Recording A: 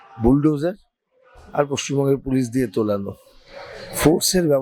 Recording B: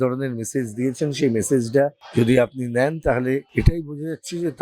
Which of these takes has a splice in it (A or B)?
B